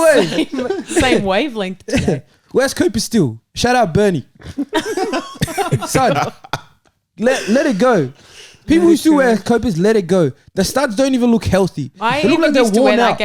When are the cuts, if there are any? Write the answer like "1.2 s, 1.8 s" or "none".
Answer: none